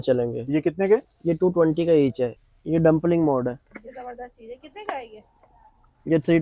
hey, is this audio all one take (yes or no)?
no